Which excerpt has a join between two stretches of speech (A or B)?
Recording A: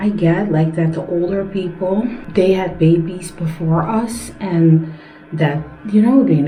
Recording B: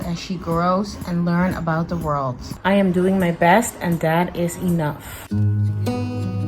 B